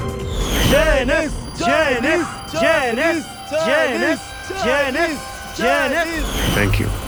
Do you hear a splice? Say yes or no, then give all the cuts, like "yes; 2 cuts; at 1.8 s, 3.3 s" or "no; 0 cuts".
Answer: no; 0 cuts